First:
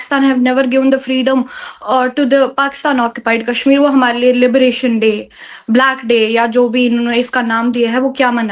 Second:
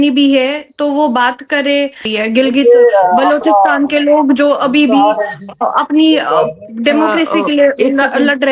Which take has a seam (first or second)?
second